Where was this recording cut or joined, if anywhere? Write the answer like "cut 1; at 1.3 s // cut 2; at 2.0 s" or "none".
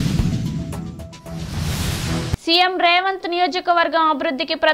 cut 1; at 2.4 s